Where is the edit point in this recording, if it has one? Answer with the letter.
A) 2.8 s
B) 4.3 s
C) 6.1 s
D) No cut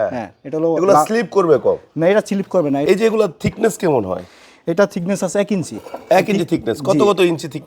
A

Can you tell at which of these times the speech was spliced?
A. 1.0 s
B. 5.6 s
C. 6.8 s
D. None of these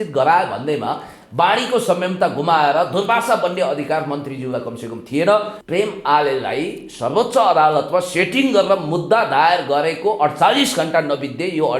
B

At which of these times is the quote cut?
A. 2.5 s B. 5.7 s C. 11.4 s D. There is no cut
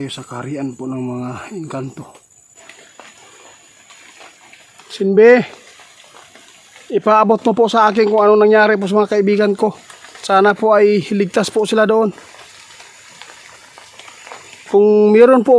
A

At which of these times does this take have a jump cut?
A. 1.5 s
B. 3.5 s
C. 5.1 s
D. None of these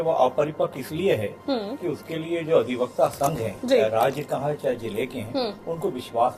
D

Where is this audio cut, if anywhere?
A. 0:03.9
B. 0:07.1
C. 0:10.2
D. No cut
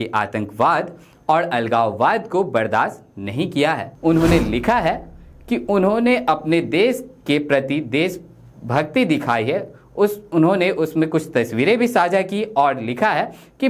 A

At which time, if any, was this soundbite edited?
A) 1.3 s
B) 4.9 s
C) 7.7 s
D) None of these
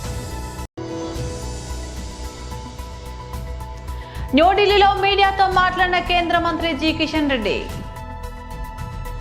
C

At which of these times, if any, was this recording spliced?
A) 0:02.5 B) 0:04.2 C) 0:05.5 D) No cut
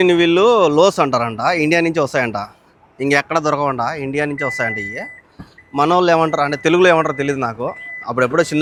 D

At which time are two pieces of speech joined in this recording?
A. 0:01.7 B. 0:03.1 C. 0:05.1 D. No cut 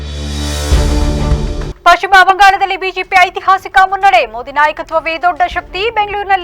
A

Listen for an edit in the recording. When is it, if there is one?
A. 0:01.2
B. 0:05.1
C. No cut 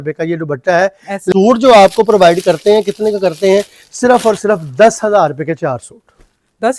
A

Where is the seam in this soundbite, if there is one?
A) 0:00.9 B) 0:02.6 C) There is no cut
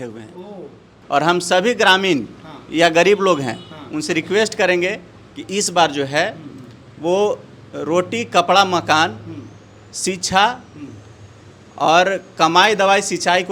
A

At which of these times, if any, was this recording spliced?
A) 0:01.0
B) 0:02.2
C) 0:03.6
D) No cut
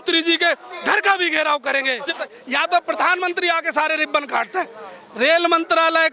B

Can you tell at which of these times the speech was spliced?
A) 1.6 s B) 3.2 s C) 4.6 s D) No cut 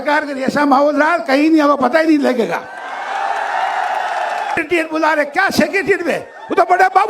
C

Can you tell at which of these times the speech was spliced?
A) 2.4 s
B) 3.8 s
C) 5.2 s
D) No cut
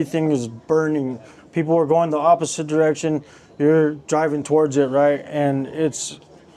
D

